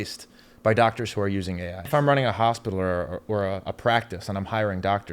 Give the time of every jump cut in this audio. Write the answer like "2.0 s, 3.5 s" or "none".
1.9 s